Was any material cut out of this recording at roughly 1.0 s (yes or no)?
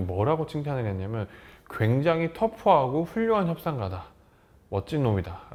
no